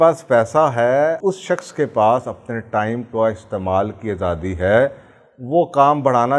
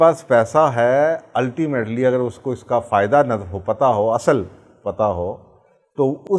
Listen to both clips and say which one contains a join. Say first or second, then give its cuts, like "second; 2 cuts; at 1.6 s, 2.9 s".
first; 1 cut; at 1.2 s